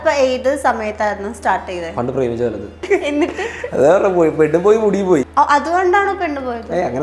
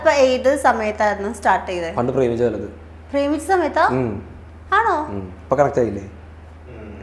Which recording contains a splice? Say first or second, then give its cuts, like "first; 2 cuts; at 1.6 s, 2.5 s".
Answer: first; 2 cuts; at 2.8 s, 5.3 s